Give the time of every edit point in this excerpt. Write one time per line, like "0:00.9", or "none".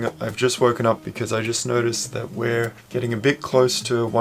0:01.1
0:02.8